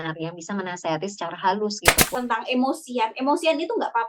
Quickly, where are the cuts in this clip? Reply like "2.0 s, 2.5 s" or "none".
2.0 s